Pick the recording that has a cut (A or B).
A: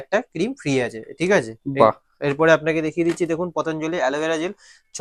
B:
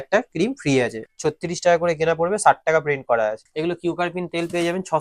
B